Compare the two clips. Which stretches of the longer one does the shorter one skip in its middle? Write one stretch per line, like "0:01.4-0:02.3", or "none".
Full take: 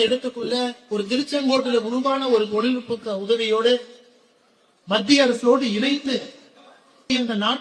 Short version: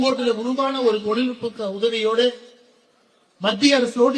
none